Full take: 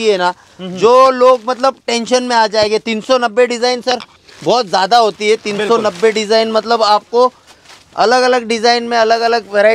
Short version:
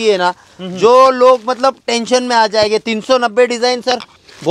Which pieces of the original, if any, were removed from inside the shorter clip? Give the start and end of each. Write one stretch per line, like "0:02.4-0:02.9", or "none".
none